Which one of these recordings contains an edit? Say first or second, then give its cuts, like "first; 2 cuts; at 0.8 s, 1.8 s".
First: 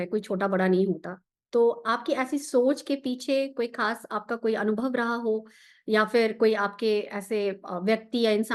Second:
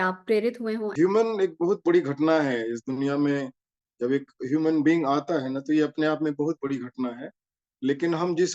second; 1 cut; at 0.9 s